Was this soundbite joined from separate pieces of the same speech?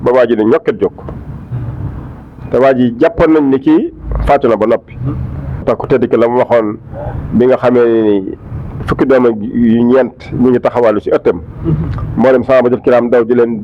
yes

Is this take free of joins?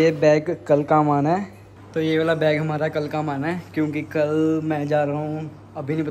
yes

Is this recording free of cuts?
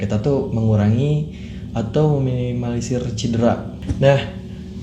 no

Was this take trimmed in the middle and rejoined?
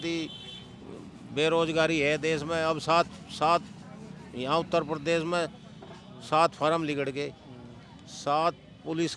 no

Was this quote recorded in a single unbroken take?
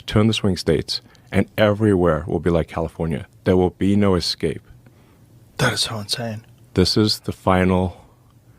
no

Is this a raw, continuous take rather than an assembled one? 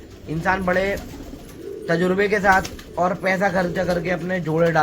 yes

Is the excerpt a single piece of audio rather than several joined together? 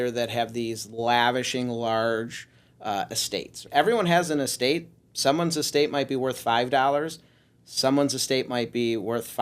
no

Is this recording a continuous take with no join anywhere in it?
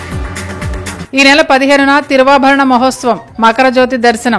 no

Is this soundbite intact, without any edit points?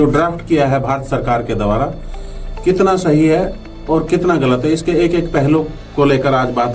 yes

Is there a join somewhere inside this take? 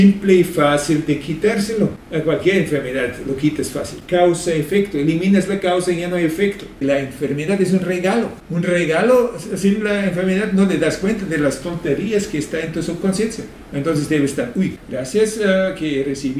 yes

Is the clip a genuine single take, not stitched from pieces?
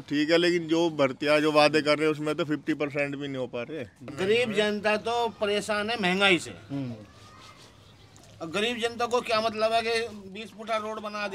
no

